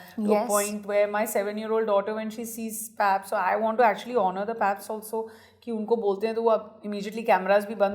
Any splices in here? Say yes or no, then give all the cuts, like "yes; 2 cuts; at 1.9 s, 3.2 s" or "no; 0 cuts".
no; 0 cuts